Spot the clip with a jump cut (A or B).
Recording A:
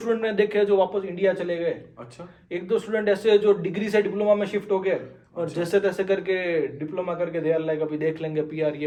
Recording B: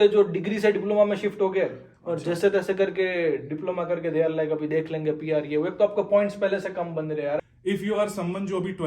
B